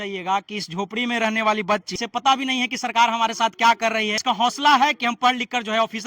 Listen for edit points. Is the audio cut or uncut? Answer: cut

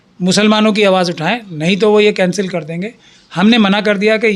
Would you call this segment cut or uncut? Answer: uncut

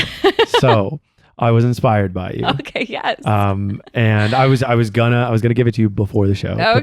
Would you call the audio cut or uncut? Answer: uncut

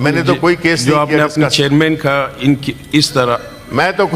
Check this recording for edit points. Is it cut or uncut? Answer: uncut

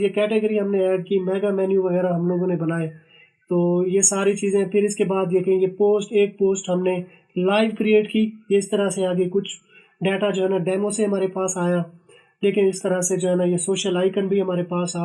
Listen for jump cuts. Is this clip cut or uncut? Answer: uncut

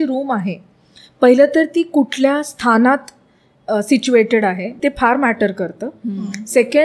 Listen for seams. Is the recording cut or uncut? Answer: uncut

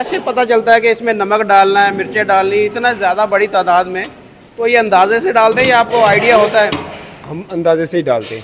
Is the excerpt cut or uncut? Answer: uncut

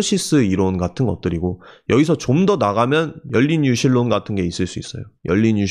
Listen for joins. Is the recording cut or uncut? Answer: uncut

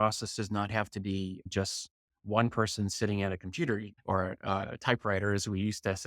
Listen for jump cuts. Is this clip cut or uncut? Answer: cut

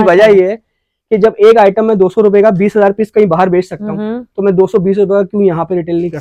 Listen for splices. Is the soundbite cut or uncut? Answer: uncut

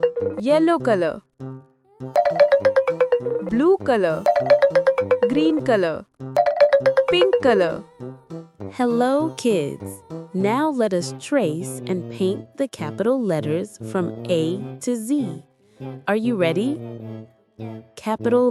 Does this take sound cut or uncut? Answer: uncut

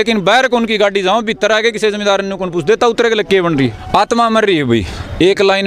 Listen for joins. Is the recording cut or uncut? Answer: cut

